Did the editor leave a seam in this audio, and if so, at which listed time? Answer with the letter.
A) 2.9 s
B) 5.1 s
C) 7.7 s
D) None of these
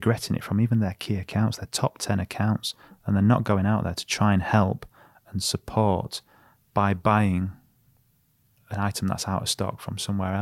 D